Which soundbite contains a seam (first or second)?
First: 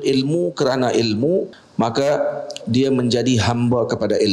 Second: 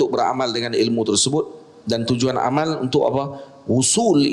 first